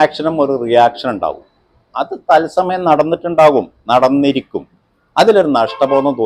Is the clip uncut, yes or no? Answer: yes